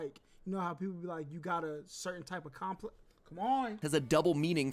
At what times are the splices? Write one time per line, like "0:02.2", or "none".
0:03.8